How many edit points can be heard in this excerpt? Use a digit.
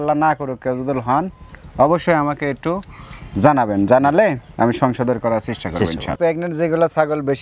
1